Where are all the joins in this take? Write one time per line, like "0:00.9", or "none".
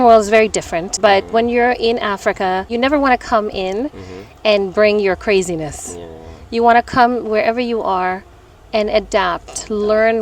0:00.9
0:02.7